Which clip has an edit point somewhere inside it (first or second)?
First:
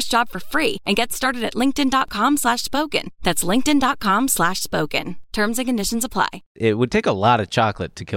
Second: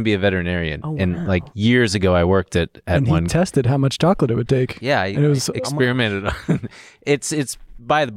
first